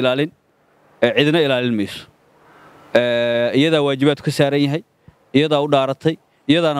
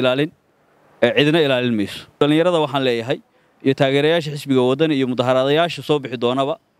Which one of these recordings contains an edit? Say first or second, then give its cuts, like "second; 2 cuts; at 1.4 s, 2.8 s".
second; 1 cut; at 2.2 s